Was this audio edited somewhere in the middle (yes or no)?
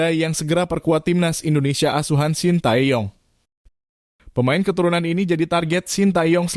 yes